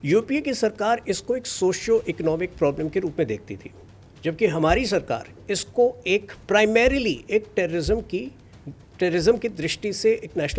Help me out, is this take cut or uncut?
uncut